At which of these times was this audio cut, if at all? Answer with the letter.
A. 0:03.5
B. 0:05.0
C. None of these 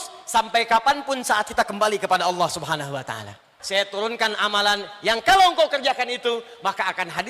A